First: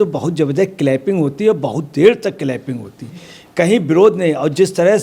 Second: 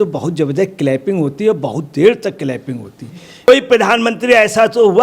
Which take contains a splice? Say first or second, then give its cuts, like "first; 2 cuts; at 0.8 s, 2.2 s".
second; 1 cut; at 3.5 s